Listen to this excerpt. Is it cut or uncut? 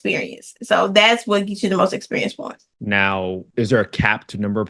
cut